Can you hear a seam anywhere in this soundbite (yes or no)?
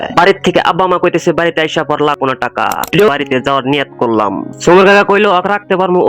yes